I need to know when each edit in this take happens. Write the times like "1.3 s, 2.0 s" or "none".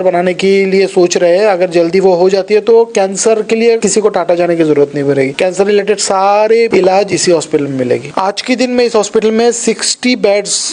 3.8 s, 5.3 s, 6.7 s, 8.1 s